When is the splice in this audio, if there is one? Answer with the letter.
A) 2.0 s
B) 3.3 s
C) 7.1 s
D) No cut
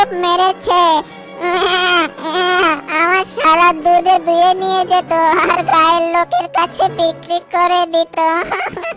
D